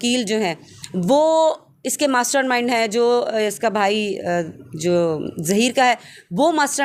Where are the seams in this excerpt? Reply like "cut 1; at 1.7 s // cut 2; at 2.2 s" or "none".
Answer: none